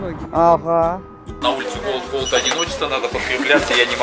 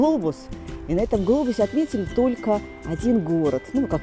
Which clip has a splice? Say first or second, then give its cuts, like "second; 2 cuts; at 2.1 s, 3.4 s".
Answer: first; 1 cut; at 1.3 s